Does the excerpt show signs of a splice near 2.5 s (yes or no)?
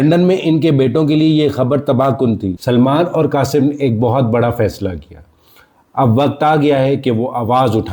yes